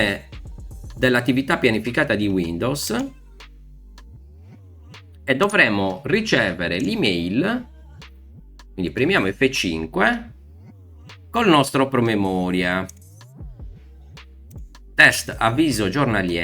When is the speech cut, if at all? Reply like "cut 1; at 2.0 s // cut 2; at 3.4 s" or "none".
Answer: cut 1; at 12.9 s // cut 2; at 14.6 s